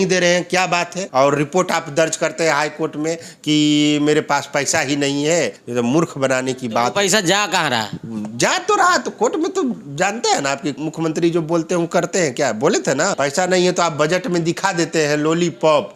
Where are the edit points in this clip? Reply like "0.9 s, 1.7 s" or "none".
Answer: 1.0 s, 5.6 s, 10.8 s, 13.1 s